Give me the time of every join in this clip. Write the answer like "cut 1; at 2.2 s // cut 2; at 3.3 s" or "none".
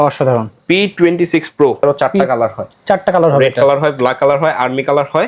cut 1; at 1.8 s